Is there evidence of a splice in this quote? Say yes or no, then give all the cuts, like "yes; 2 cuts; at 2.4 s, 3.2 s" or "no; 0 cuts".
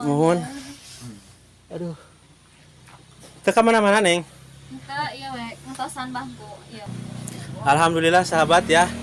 no; 0 cuts